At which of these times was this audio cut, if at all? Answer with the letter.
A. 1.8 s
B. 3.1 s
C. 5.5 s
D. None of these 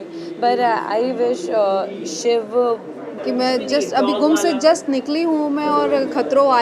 B